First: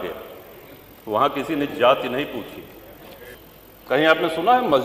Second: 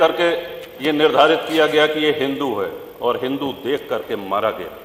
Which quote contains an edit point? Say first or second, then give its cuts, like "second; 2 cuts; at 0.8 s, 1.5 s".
first; 1 cut; at 3.4 s